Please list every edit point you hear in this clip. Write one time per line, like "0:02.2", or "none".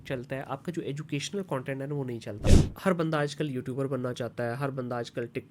0:02.5